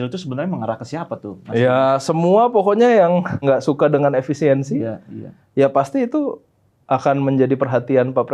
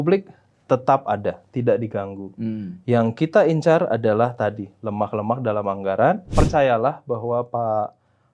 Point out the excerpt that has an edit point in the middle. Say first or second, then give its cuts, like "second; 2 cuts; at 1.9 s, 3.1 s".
second; 1 cut; at 6.3 s